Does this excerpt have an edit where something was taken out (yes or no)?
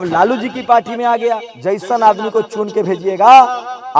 yes